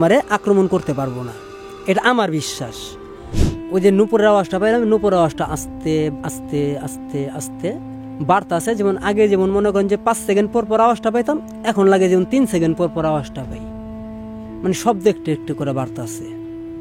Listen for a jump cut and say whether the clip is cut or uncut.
cut